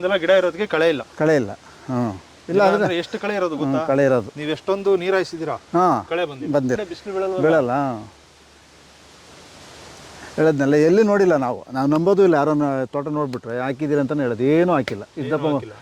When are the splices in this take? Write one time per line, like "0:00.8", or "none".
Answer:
0:06.9